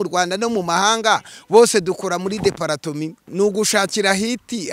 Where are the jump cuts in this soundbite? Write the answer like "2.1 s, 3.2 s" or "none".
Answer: 3.2 s

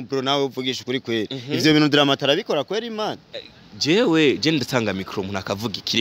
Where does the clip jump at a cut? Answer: none

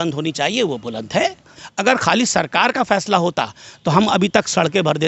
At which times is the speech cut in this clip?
1.5 s

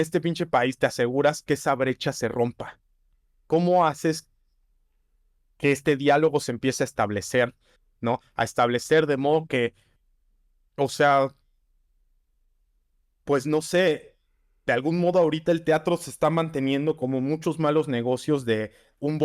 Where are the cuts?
none

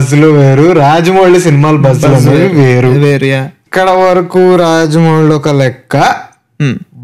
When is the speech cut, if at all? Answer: 3.6 s

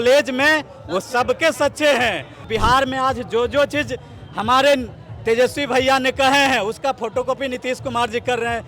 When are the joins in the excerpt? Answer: 2.4 s

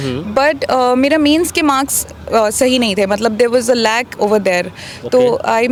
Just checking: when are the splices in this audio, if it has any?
none

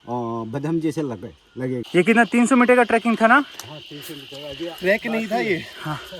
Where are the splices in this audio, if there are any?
1.9 s

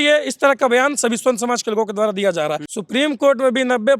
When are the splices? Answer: 2.7 s

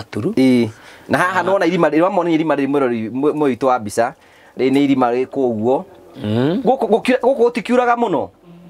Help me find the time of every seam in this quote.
none

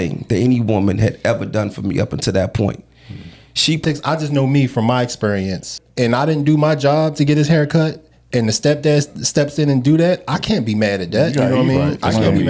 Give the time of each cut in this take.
3.8 s, 5.8 s

